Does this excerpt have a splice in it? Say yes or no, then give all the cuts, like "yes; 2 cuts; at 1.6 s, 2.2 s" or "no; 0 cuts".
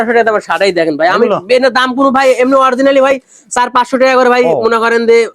no; 0 cuts